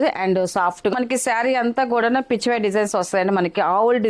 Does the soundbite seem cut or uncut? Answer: cut